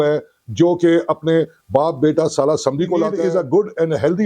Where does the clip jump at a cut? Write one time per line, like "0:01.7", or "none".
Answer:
0:03.2